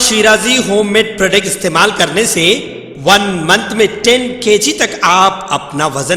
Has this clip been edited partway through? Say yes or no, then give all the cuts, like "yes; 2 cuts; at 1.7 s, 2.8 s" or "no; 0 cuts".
no; 0 cuts